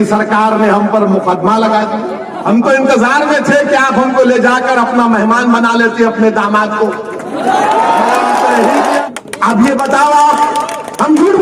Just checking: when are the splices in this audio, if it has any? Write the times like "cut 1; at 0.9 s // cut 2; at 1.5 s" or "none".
cut 1; at 2.3 s // cut 2; at 9.0 s